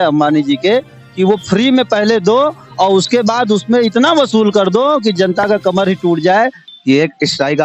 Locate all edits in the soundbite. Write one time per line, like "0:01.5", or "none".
0:06.6